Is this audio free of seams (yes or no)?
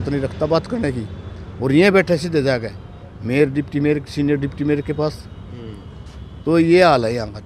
yes